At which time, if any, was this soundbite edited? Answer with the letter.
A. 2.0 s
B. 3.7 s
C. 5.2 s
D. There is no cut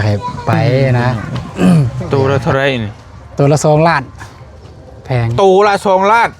A